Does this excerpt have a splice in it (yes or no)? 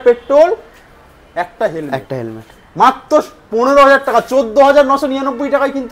no